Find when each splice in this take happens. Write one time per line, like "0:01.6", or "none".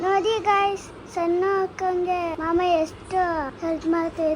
0:02.3
0:03.5